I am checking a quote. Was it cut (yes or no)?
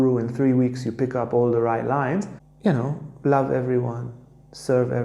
yes